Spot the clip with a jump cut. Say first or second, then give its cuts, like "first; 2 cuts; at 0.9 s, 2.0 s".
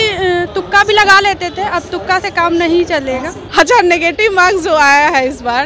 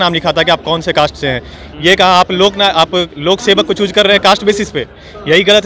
first; 1 cut; at 3.4 s